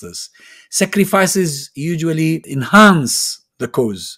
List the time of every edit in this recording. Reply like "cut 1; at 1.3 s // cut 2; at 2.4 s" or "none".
cut 1; at 2.5 s